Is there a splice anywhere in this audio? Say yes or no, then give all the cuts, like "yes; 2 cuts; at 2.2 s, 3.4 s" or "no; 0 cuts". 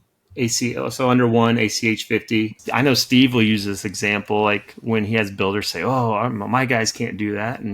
yes; 1 cut; at 2.5 s